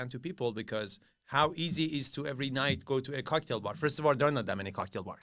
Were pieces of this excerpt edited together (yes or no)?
no